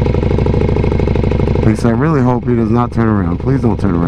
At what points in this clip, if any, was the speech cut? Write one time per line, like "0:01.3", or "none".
none